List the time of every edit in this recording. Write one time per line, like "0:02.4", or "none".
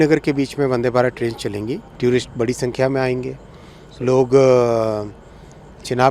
0:01.9